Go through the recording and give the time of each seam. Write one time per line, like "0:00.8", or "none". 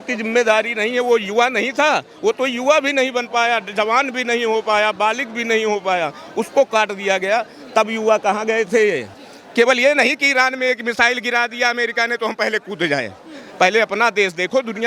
0:09.1